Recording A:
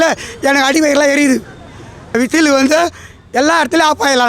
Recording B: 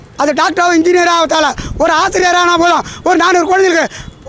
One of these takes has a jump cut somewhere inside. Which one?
A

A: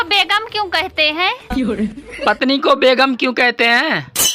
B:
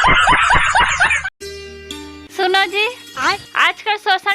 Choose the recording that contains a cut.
B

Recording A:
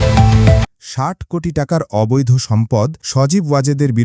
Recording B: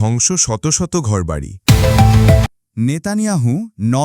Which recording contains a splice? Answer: B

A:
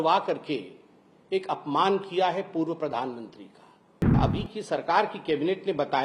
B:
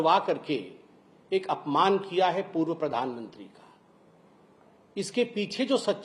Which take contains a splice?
A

